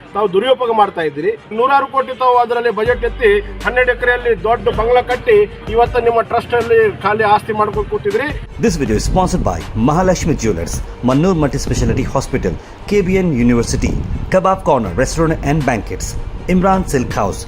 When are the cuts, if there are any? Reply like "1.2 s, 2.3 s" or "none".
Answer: 1.5 s, 8.4 s